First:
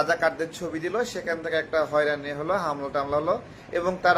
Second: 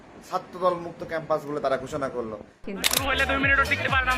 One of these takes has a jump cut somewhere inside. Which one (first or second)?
second